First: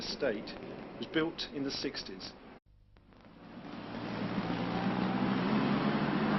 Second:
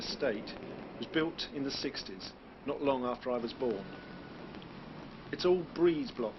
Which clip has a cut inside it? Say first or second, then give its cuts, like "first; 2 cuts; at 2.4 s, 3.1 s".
second; 1 cut; at 2.6 s